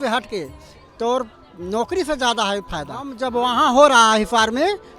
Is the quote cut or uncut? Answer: cut